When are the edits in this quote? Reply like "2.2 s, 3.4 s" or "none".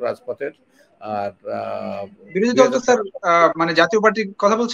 none